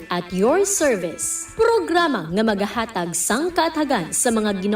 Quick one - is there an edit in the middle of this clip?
yes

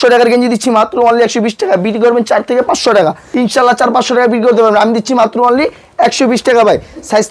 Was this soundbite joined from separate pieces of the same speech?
yes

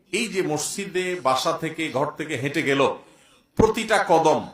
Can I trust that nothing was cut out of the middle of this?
yes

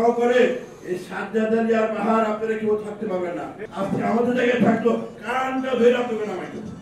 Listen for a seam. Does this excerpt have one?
yes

